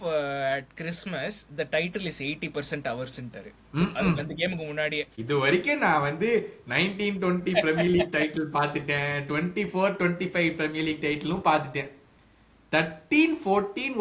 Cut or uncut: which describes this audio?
cut